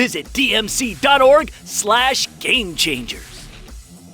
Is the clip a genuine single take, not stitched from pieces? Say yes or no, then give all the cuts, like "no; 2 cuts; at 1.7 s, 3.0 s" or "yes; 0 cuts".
no; 1 cut; at 3.1 s